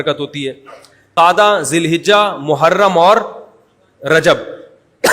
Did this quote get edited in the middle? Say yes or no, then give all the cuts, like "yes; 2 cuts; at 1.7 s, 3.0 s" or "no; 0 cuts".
yes; 1 cut; at 1.1 s